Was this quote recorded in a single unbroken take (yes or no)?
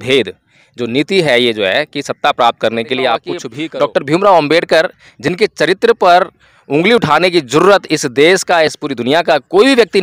no